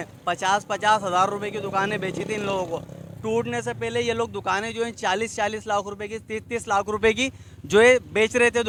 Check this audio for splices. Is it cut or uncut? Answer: uncut